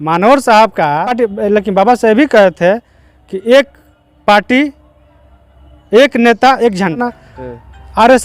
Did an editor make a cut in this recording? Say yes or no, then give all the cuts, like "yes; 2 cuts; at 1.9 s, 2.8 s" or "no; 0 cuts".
yes; 2 cuts; at 1.1 s, 7.0 s